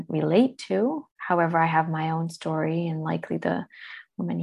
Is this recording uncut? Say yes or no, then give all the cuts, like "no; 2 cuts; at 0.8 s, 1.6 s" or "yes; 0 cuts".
no; 1 cut; at 1.1 s